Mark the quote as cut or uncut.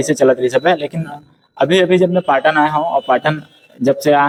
uncut